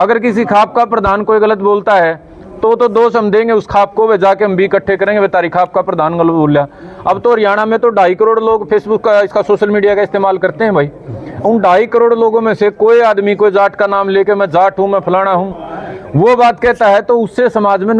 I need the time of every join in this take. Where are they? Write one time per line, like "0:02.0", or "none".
none